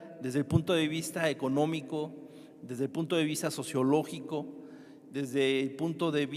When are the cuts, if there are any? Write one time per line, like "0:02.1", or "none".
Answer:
0:02.0